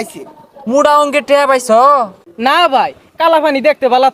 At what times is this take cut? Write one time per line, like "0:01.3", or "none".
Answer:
none